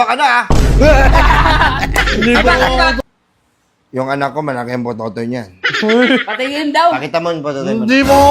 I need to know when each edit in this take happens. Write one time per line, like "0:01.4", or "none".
0:03.0